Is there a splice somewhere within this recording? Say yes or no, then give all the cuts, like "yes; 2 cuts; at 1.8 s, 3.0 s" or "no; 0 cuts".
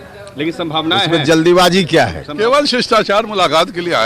yes; 1 cut; at 2.2 s